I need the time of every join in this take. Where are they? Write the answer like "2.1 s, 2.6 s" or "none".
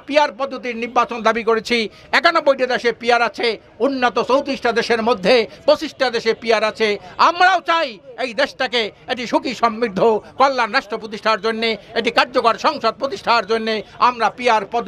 none